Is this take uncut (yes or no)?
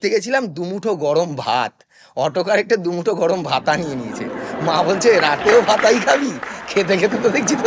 yes